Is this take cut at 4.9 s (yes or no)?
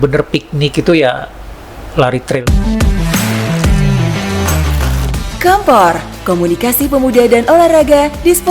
no